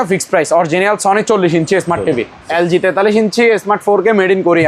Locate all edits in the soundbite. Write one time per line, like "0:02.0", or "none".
0:02.4

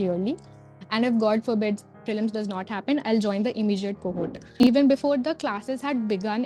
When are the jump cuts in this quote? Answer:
0:04.5

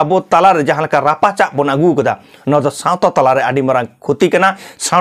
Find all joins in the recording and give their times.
none

